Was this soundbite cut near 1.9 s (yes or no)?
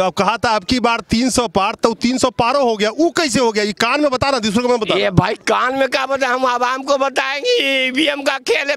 no